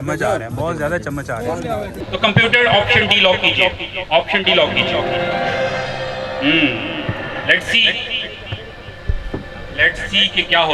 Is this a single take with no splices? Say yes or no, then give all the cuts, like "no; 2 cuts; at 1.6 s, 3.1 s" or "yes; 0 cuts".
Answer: no; 1 cut; at 1.7 s